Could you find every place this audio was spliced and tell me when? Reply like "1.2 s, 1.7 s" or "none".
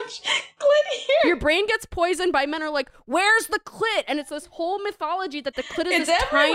none